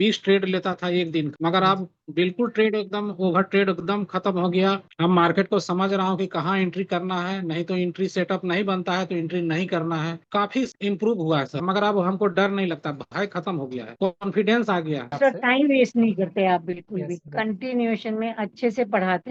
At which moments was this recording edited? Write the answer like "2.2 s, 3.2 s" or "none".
1.3 s, 11.6 s, 15.1 s